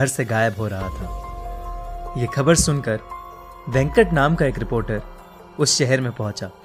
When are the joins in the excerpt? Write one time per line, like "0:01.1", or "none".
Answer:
none